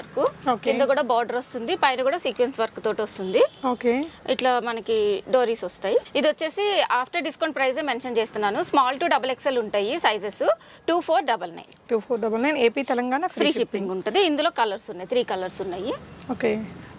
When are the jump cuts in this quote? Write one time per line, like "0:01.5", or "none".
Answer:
none